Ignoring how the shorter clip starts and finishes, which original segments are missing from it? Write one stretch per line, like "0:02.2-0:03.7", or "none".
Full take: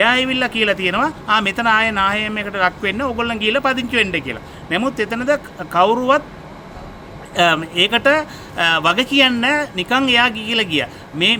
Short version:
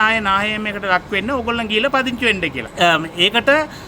0:04.3-0:07.2